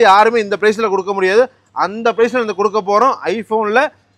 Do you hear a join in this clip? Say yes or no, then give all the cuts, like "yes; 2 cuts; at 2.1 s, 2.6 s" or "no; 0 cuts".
no; 0 cuts